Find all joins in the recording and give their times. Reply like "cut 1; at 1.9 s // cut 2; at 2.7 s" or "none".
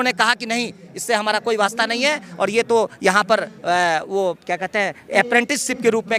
none

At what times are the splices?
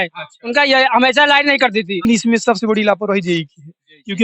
cut 1; at 2.0 s

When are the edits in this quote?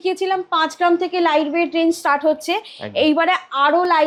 none

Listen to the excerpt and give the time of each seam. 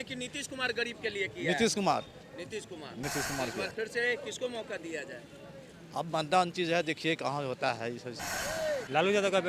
cut 1; at 8.2 s

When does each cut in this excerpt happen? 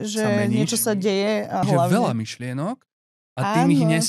cut 1; at 1.6 s

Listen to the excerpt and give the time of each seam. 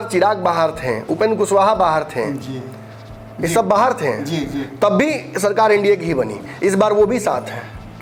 none

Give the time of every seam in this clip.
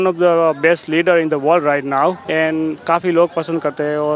cut 1; at 2.2 s

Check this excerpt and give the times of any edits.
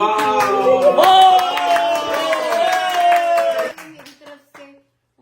cut 1; at 3.8 s

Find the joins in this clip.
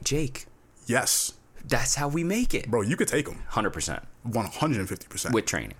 none

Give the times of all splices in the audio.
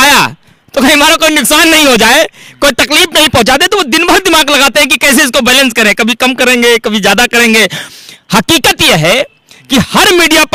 none

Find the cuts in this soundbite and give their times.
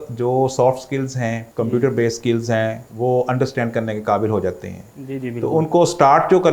cut 1; at 1.4 s // cut 2; at 2.8 s

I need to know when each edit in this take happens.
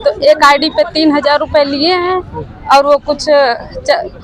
none

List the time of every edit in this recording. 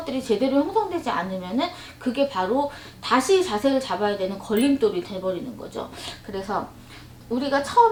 none

